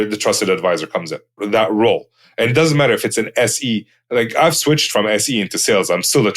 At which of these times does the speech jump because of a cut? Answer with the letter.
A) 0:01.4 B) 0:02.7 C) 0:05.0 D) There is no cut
A